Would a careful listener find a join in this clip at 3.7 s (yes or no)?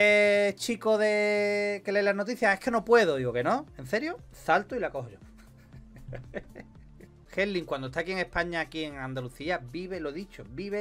no